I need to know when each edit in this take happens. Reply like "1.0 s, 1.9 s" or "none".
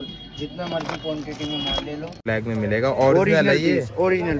2.1 s